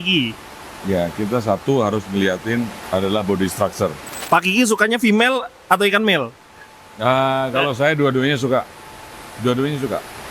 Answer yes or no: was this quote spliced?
yes